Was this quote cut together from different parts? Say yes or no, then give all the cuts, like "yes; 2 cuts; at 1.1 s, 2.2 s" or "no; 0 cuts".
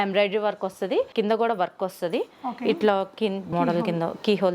yes; 2 cuts; at 1.1 s, 3.5 s